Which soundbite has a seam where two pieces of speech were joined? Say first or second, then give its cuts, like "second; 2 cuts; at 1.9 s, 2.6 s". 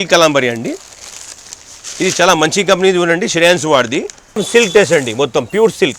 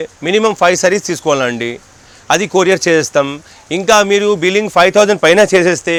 first; 1 cut; at 4.4 s